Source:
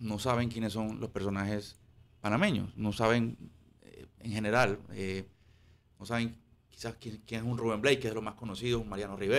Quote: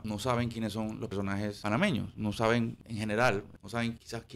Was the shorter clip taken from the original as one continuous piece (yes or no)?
no